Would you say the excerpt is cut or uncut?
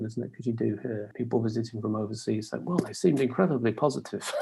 cut